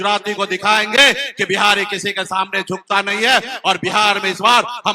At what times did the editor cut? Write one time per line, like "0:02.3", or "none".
none